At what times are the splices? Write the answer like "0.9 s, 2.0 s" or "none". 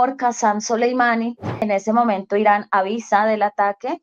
1.6 s